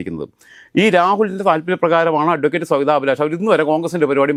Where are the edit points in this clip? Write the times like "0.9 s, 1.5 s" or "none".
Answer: none